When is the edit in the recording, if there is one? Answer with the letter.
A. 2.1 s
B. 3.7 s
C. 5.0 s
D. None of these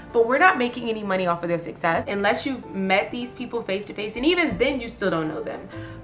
A